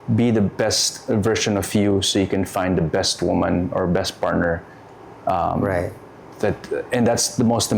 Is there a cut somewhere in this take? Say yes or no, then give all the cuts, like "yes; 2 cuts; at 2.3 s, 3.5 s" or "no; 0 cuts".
no; 0 cuts